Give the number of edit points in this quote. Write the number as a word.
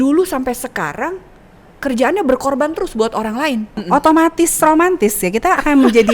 one